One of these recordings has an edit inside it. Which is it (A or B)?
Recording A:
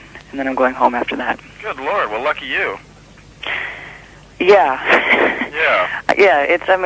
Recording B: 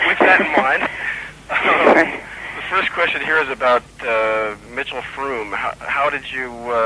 A